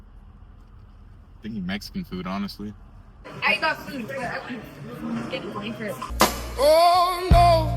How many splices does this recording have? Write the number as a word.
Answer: one